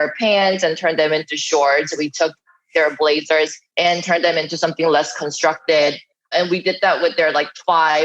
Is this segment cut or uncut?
cut